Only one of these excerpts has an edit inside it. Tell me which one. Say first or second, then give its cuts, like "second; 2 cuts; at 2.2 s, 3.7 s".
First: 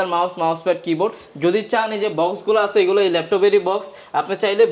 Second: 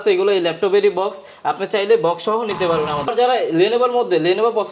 second; 1 cut; at 3.1 s